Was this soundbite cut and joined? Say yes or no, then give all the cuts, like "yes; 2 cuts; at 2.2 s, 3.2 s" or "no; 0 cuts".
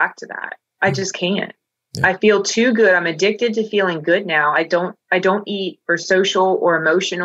no; 0 cuts